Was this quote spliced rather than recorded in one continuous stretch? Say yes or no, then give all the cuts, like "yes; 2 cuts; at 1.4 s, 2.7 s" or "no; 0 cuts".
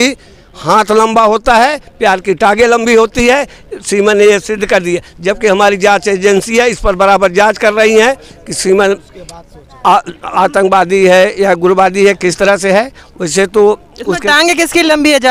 no; 0 cuts